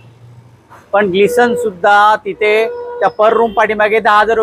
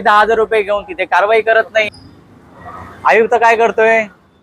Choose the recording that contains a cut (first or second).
second